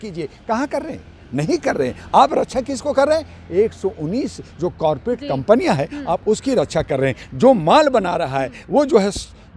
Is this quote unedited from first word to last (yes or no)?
yes